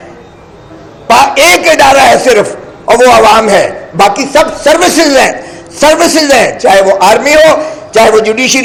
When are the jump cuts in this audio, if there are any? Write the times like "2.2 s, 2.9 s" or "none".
none